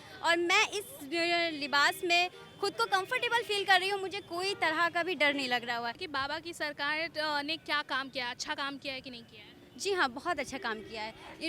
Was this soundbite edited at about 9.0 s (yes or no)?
no